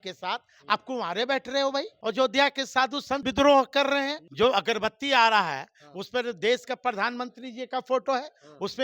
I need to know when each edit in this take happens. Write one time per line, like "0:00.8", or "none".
0:01.9
0:03.3
0:04.2